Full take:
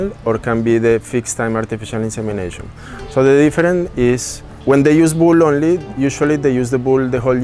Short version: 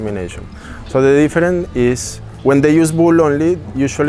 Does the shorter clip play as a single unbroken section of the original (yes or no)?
yes